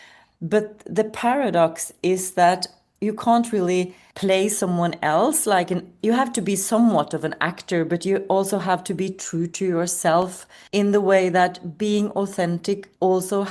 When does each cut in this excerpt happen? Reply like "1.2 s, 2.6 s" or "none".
none